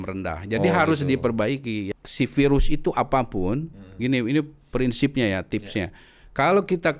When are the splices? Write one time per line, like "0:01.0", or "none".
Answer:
0:02.0